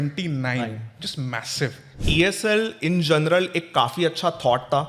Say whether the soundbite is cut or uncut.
cut